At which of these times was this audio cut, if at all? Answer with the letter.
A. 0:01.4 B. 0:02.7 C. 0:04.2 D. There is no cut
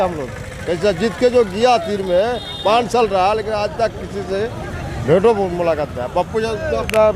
D